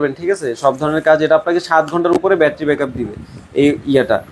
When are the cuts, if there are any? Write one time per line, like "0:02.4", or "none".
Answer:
none